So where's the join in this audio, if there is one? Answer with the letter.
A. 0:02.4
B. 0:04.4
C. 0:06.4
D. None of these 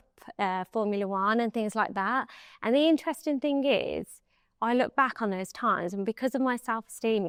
D